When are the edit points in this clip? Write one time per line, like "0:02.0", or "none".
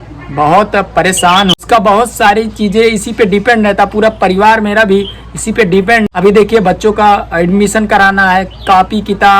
0:01.6
0:06.0